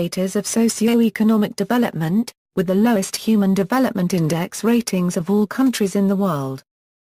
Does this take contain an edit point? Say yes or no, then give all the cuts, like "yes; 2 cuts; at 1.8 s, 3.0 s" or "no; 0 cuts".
no; 0 cuts